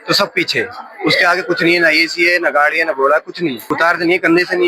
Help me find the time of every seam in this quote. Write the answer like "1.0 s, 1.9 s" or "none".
3.6 s